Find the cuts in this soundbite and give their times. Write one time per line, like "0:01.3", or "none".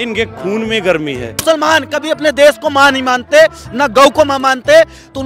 0:01.4